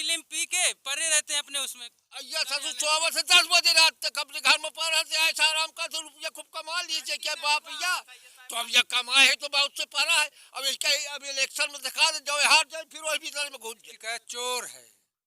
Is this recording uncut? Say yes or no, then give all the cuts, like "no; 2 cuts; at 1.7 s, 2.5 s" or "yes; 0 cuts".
no; 1 cut; at 13.9 s